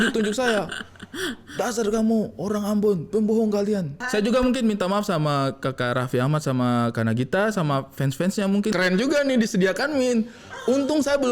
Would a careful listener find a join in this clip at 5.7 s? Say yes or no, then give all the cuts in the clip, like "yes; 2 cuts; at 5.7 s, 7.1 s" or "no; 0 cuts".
no; 2 cuts; at 4.0 s, 8.7 s